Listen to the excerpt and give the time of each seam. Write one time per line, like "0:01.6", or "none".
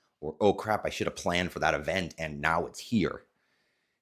none